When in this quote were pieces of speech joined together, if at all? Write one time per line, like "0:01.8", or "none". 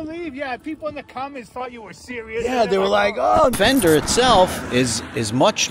0:03.5